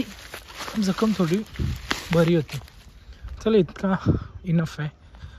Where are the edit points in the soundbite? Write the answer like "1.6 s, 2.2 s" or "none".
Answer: none